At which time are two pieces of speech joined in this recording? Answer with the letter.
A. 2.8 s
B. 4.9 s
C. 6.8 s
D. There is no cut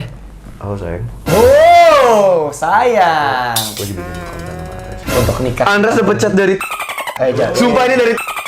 B